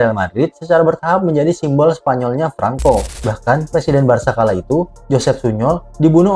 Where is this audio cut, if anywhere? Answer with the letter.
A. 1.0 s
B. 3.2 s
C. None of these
B